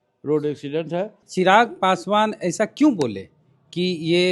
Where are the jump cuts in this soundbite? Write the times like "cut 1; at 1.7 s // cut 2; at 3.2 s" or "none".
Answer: cut 1; at 1.2 s